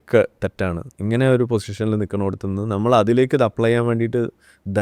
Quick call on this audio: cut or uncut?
uncut